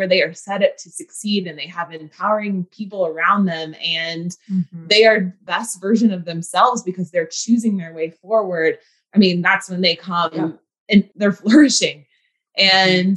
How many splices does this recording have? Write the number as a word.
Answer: three